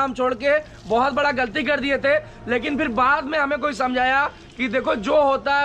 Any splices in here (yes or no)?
no